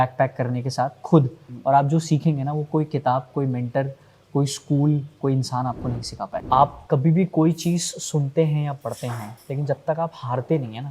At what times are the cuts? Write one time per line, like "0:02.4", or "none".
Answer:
0:06.4